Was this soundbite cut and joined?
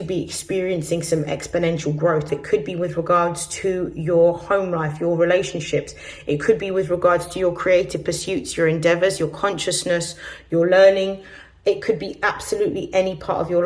yes; 1 cut; at 2.3 s

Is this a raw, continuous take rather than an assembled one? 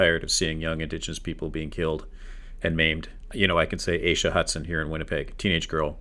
no; 1 cut; at 3.2 s

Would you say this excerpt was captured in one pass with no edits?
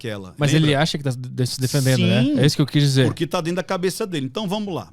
yes; 0 cuts

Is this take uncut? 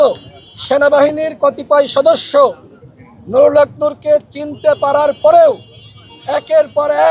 yes; 0 cuts

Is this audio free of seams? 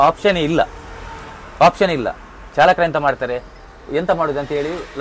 yes; 0 cuts

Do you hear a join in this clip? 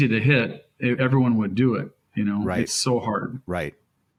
no; 0 cuts

